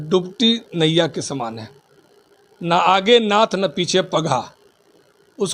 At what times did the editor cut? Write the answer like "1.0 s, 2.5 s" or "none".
none